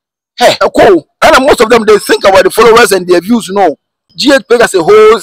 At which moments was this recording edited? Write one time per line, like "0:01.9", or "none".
0:01.1
0:04.1